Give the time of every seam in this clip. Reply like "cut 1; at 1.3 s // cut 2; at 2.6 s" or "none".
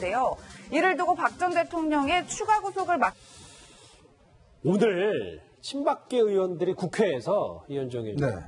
none